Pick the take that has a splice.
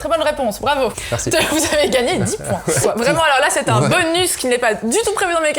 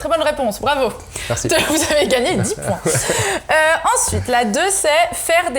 first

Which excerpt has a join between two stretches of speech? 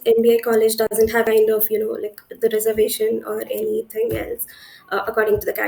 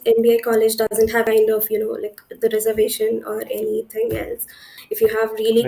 second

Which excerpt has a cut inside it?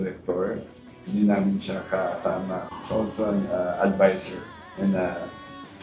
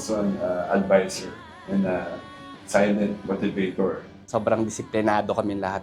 second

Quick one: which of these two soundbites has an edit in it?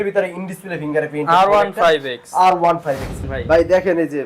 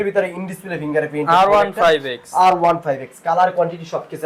first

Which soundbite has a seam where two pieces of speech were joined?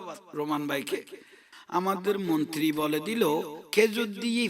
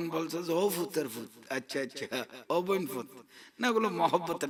first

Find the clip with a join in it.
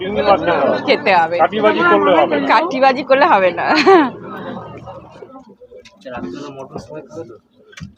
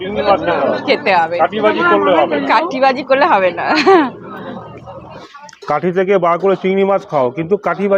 second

